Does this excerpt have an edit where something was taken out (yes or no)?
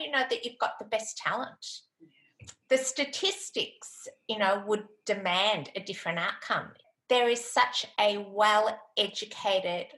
yes